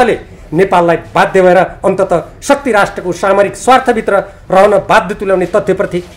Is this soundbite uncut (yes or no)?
yes